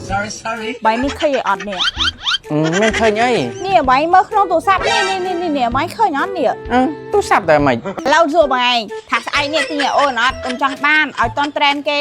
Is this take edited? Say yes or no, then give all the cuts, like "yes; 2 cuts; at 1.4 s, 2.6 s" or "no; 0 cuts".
yes; 1 cut; at 8.0 s